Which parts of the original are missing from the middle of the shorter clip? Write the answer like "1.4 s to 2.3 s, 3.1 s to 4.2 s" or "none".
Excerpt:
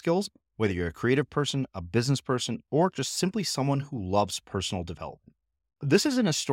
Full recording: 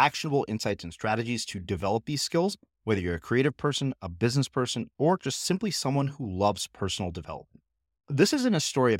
none